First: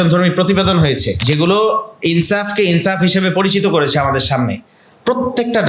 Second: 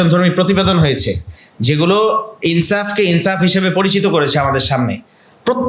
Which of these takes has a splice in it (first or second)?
first